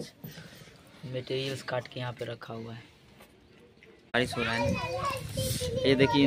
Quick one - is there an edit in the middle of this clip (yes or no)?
yes